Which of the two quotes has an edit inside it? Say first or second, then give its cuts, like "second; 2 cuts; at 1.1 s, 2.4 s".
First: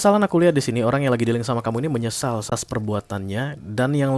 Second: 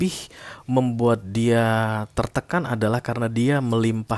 first; 1 cut; at 2.5 s